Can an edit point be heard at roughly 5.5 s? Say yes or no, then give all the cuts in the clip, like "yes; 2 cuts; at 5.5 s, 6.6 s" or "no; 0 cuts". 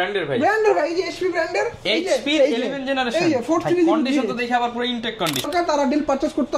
yes; 1 cut; at 5.5 s